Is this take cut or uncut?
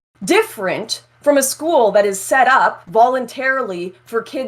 cut